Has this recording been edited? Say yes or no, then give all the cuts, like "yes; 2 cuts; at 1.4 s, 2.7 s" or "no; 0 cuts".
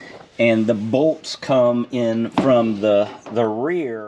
no; 0 cuts